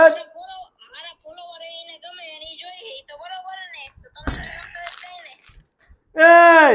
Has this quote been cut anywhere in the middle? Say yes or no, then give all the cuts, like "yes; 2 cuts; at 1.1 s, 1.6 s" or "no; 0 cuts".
no; 0 cuts